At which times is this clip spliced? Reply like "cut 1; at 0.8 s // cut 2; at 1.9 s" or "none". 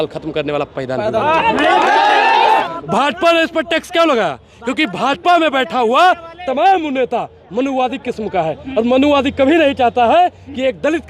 cut 1; at 2.6 s

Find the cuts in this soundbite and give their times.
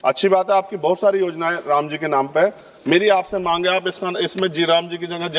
none

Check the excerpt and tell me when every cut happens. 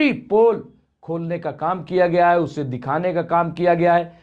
none

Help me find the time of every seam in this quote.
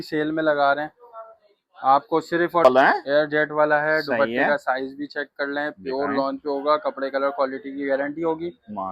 cut 1; at 2.6 s

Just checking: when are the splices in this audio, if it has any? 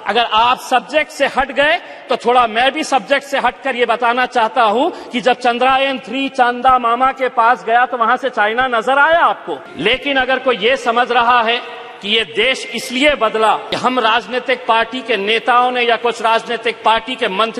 cut 1; at 9.7 s // cut 2; at 13.7 s

